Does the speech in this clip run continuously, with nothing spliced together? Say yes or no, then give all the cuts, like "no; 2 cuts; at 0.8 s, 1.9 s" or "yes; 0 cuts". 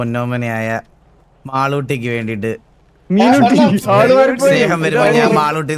yes; 0 cuts